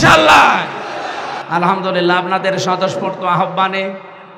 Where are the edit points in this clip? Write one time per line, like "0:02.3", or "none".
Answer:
0:01.3